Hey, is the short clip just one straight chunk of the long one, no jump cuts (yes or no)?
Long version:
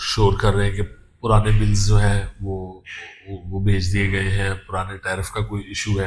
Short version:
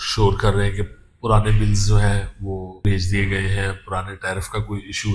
no